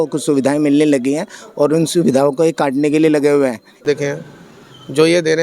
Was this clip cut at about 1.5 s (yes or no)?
no